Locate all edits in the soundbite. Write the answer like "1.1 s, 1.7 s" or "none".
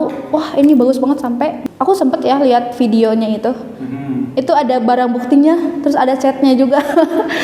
1.6 s